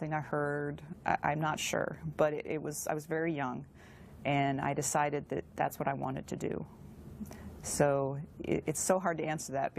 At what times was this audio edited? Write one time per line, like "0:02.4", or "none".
0:08.2